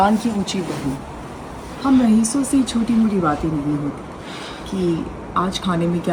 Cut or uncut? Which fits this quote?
uncut